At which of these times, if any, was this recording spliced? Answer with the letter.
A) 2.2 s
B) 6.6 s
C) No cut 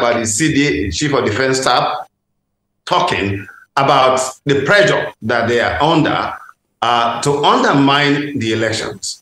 C